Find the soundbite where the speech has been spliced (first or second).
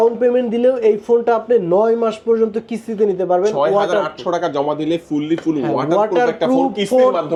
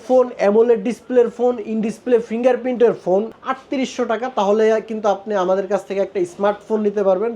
second